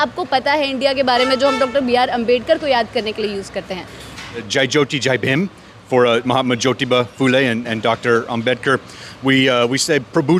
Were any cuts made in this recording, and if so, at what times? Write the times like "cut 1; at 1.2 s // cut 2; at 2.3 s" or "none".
cut 1; at 4.5 s